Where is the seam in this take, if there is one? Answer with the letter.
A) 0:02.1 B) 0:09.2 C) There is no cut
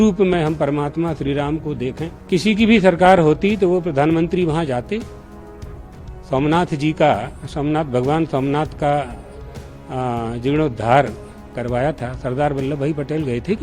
A